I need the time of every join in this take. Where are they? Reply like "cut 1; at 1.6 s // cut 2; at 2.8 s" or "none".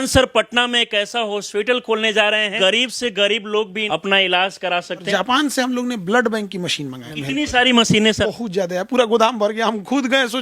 cut 1; at 2.5 s // cut 2; at 3.8 s // cut 3; at 5.1 s // cut 4; at 7.1 s // cut 5; at 8.2 s